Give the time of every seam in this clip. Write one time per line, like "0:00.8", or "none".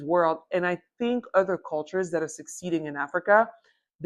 none